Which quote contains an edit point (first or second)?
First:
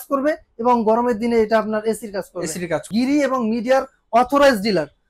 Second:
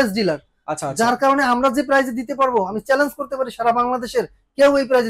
first